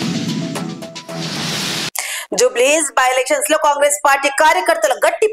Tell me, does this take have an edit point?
yes; 1 cut; at 1.8 s

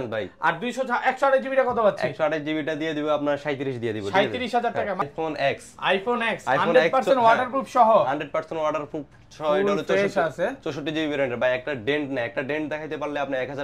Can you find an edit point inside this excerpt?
yes; 1 cut; at 5.0 s

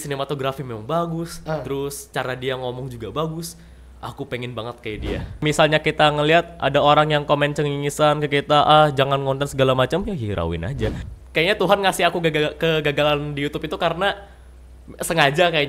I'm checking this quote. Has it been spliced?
yes; 2 cuts; at 5.4 s, 11.1 s

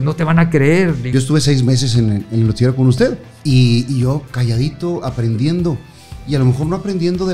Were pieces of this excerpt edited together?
yes; 2 cuts; at 1.1 s, 3.3 s

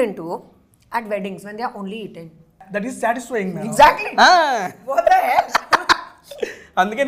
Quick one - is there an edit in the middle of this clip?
yes; 1 cut; at 2.7 s

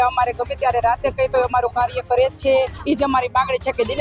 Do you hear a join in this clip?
yes; 1 cut; at 2.8 s

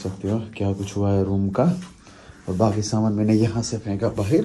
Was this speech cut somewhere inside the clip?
no; 0 cuts

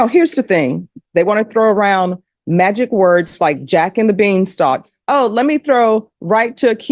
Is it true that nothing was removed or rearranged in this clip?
no; 1 cut; at 0.9 s

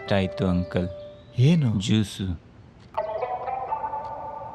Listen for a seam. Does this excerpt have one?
no; 0 cuts

